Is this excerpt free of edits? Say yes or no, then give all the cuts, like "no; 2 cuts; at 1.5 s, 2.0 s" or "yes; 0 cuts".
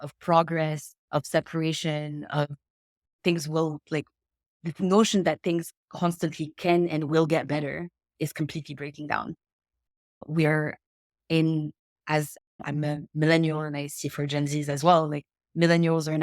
no; 2 cuts; at 0.9 s, 8.0 s